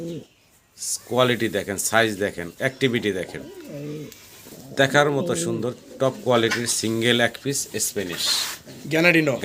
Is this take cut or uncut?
uncut